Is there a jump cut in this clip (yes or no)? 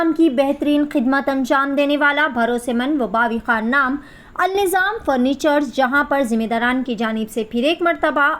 no